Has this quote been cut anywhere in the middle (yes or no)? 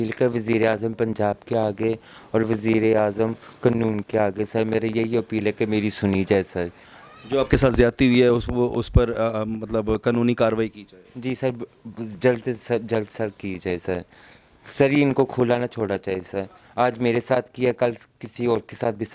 no